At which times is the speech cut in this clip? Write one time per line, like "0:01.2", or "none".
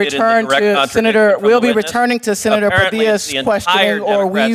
none